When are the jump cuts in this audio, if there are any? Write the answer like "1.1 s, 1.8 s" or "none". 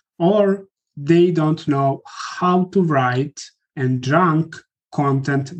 none